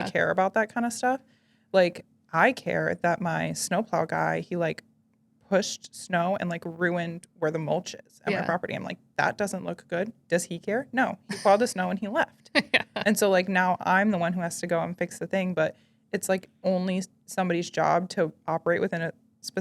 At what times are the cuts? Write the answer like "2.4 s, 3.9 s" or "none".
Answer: 2.0 s